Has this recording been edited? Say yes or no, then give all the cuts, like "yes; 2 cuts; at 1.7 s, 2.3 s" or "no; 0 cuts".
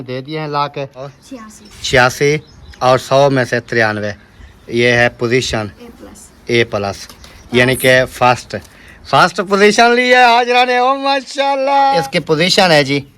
yes; 2 cuts; at 1.2 s, 12.0 s